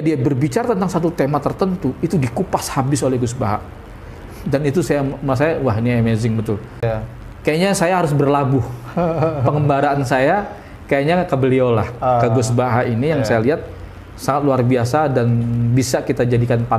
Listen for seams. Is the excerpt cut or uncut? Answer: cut